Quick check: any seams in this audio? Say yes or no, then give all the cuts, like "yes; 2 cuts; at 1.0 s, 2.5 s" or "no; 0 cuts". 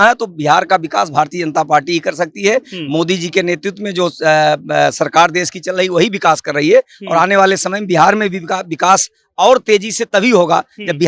no; 0 cuts